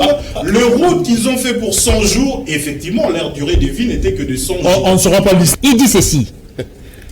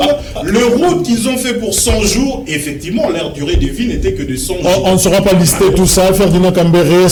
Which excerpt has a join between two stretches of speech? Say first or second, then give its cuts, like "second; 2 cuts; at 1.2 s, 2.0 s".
first; 1 cut; at 5.5 s